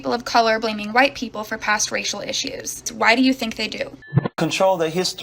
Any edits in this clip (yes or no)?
yes